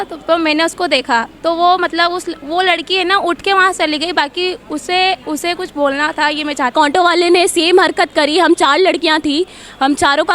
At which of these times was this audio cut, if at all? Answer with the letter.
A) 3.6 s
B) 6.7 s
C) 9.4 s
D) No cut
B